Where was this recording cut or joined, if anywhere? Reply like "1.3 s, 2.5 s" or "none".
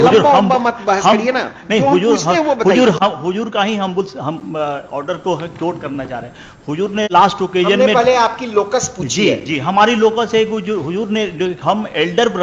none